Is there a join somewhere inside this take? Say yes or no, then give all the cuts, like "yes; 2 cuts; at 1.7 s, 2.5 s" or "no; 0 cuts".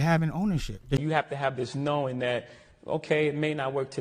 yes; 1 cut; at 1.0 s